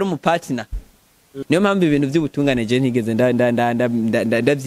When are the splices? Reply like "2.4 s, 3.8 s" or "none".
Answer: 1.3 s

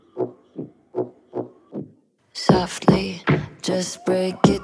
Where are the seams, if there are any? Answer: 1.2 s

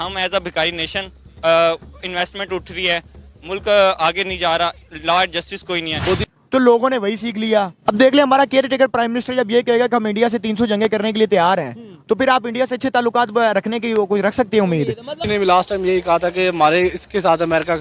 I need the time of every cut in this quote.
6.2 s, 15.2 s

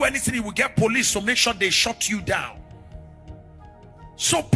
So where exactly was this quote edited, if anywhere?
none

